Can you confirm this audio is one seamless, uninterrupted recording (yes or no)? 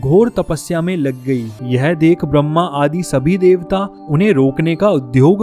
no